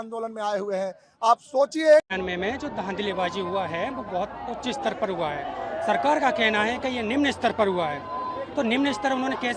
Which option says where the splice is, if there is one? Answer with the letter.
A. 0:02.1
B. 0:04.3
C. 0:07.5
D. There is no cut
A